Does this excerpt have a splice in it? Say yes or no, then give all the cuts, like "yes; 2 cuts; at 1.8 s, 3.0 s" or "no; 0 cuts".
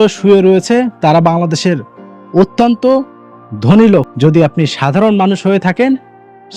yes; 1 cut; at 4.1 s